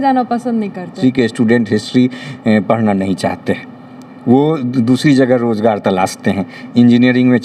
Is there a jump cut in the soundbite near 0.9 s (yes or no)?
yes